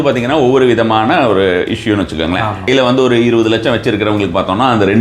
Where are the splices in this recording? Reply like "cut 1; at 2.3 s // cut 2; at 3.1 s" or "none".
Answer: cut 1; at 2.7 s